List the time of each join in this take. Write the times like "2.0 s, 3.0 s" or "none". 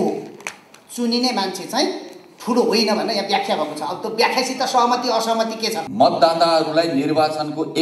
5.8 s

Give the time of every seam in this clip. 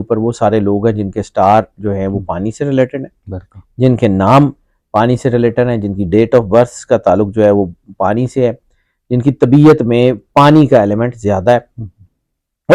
none

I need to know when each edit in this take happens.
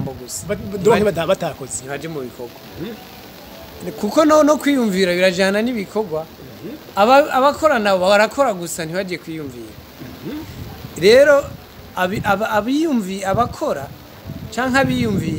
none

